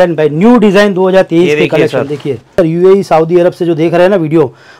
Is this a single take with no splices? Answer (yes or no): no